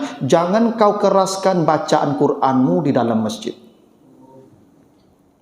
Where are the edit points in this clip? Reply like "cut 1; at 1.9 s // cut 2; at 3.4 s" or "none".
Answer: none